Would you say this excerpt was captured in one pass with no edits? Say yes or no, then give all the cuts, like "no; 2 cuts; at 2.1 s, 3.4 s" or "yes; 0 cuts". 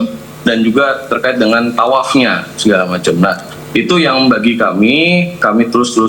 yes; 0 cuts